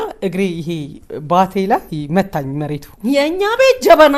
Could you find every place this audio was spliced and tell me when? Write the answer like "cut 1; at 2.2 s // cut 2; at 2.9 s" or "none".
cut 1; at 2.9 s